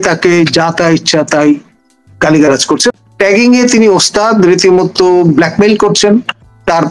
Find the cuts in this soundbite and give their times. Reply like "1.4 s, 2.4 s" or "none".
2.9 s